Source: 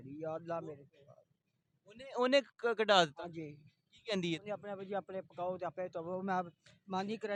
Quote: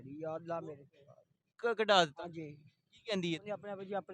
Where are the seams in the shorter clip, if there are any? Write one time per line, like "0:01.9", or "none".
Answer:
0:01.5